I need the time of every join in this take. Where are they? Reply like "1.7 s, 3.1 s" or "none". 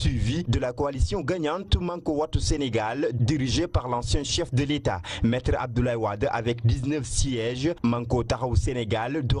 7.8 s